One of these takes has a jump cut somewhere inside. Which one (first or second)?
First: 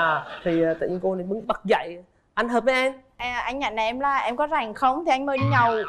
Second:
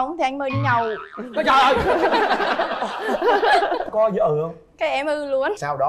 first